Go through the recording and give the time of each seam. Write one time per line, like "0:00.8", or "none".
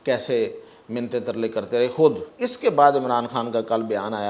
0:02.3